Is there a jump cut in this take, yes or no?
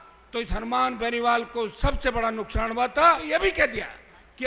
yes